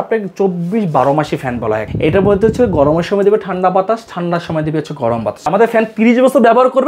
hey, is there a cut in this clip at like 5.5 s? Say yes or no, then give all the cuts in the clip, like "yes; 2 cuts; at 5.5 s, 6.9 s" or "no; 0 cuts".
yes; 2 cuts; at 1.9 s, 5.5 s